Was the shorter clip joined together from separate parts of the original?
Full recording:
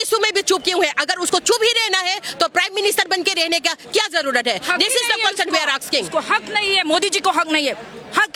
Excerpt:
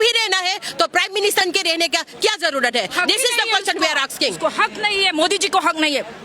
yes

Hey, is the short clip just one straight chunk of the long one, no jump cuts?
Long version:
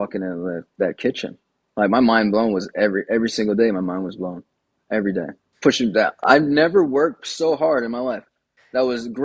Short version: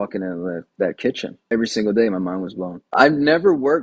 no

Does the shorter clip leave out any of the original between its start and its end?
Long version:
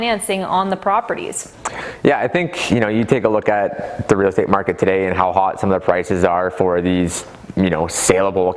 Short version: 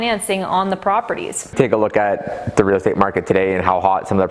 yes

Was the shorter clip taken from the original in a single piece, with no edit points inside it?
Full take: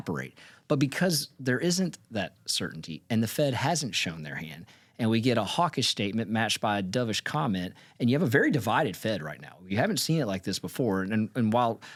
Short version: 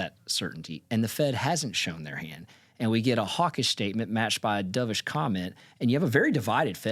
yes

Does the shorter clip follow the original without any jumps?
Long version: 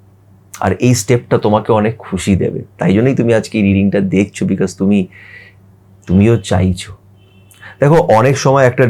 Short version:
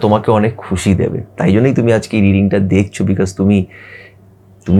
yes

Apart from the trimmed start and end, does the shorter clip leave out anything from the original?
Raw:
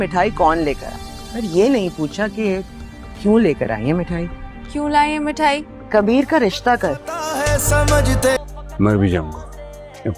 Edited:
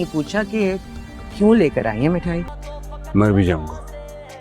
yes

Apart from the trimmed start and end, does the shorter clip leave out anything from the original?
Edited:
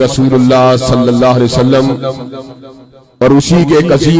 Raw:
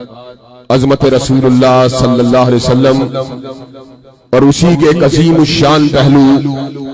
no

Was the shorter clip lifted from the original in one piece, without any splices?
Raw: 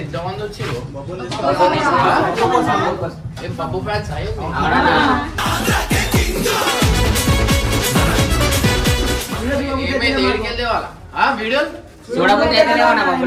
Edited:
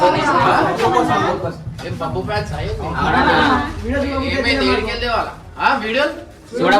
no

